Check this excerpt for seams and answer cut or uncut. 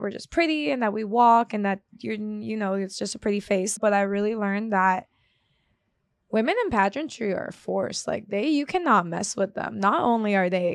cut